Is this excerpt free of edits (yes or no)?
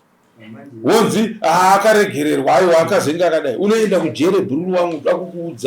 yes